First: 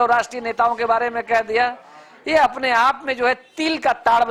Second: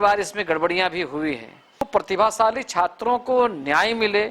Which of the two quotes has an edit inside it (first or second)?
second